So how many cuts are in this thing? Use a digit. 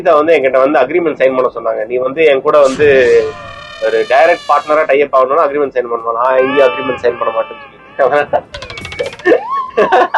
0